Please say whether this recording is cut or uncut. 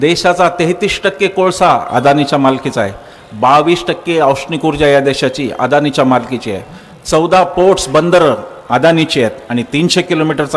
uncut